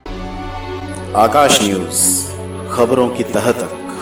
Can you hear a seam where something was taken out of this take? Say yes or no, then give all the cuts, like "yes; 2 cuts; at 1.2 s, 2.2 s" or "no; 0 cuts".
no; 0 cuts